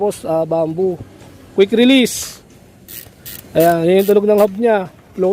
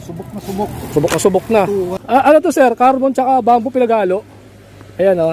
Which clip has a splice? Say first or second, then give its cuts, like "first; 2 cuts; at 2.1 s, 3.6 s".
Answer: second; 1 cut; at 2.0 s